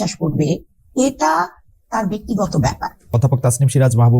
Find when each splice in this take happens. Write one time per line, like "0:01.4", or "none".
0:03.2